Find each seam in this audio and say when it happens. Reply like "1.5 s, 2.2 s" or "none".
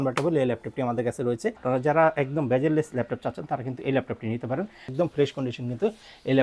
1.6 s, 4.9 s